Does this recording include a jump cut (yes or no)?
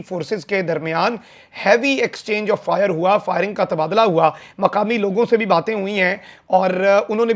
no